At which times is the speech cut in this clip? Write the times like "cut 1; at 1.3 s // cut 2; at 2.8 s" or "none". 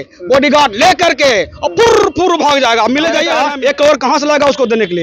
cut 1; at 3.3 s